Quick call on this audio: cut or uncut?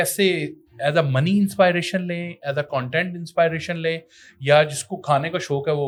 uncut